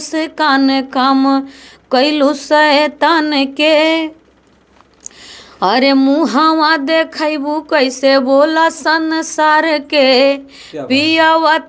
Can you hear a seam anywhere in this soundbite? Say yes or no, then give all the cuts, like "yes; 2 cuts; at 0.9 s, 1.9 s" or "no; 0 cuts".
no; 0 cuts